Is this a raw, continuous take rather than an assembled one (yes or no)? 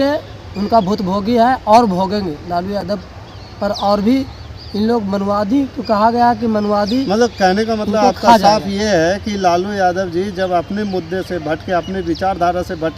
yes